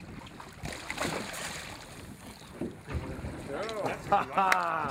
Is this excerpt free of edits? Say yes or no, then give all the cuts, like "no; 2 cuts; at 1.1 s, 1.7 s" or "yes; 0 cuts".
yes; 0 cuts